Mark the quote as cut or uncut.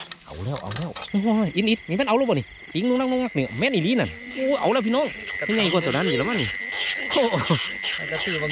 cut